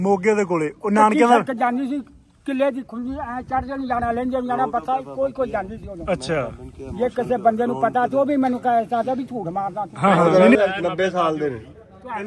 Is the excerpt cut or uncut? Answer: cut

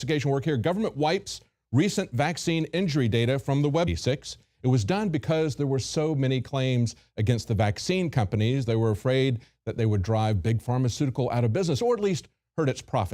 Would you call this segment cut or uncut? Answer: uncut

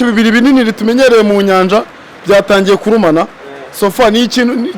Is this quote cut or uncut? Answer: uncut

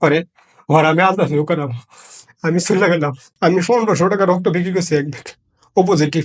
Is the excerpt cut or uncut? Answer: cut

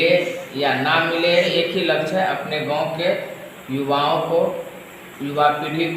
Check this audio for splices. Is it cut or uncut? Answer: cut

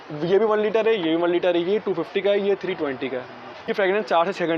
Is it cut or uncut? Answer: cut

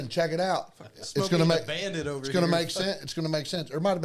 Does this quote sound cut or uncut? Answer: uncut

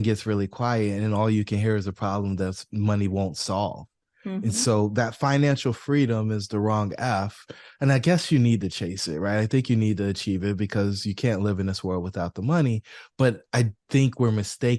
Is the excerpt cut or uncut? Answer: uncut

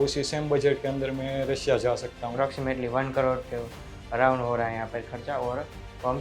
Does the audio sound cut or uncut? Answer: cut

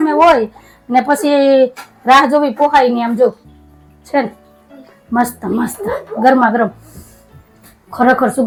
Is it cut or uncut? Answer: uncut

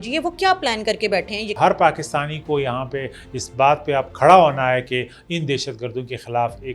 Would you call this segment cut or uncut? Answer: cut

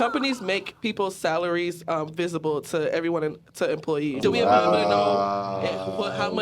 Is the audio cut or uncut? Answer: cut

